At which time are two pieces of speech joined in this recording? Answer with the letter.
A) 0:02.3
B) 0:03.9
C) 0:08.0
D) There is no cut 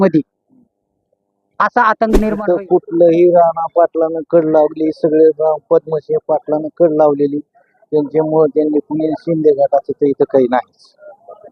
A